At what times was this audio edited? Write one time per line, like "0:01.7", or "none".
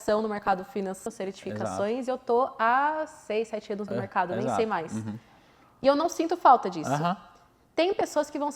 0:01.1